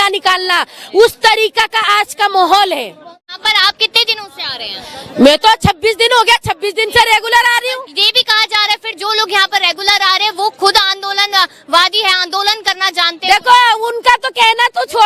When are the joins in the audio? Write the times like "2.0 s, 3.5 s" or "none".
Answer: 3.4 s